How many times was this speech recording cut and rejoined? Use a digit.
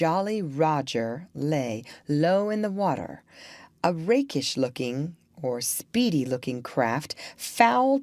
1